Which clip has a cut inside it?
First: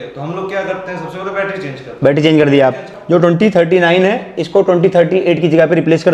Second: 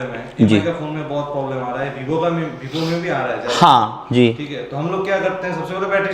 first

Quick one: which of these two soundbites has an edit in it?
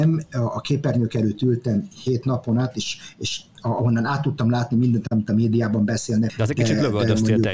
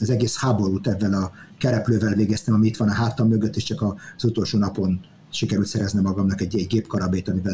first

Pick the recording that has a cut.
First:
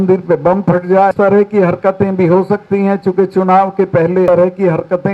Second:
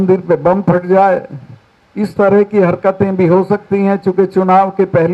first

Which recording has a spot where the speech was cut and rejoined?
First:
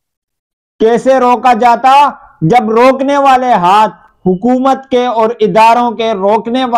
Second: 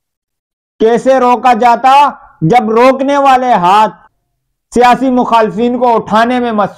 second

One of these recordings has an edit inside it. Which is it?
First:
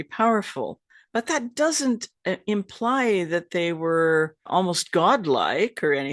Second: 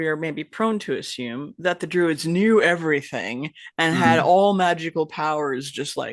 first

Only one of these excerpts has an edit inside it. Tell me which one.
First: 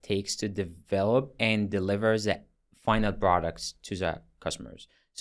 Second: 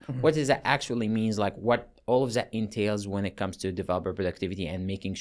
first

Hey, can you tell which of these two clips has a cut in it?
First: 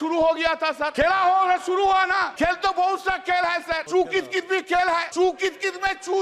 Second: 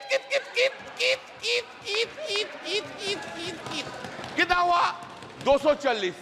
first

